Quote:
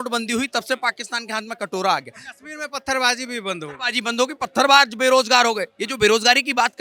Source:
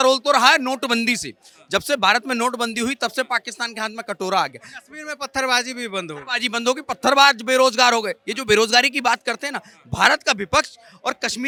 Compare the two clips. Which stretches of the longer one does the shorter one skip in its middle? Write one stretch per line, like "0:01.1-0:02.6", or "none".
none